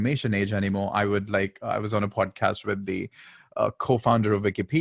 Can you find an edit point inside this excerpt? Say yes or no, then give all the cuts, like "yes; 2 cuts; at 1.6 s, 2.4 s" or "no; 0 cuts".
no; 0 cuts